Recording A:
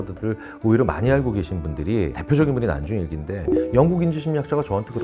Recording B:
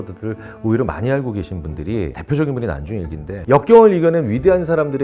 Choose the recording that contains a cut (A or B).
B